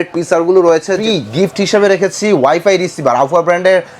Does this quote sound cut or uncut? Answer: cut